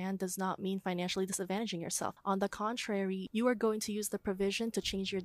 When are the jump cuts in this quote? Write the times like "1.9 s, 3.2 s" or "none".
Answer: none

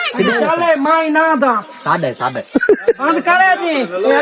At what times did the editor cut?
none

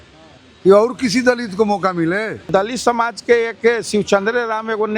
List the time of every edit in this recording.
2.5 s

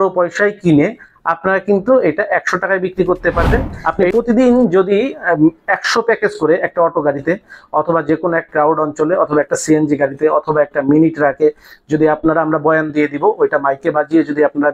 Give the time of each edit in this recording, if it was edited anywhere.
3.7 s

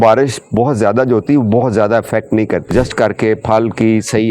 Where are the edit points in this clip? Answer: 2.7 s

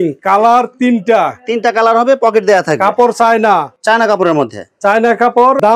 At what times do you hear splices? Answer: none

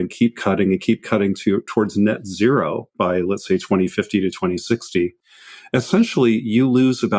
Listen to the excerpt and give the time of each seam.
none

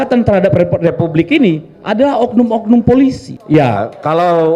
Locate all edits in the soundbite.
3.3 s

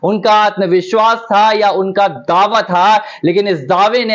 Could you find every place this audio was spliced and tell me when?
1.0 s

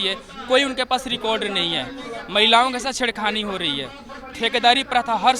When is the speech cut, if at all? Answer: none

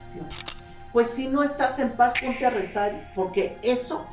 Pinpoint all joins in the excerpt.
3.0 s

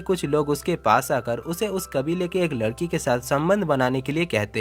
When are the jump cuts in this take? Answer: none

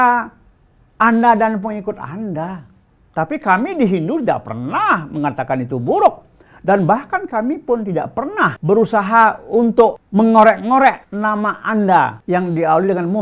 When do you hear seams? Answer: 8.6 s, 10.0 s, 11.1 s, 12.2 s

